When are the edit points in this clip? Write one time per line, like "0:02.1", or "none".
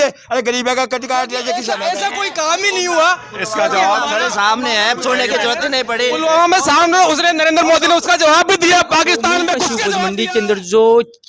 0:01.7
0:09.8